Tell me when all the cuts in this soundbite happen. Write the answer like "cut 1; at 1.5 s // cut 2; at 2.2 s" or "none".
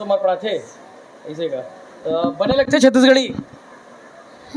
none